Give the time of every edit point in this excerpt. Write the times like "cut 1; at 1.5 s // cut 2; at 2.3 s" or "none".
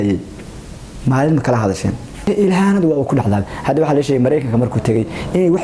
cut 1; at 2.3 s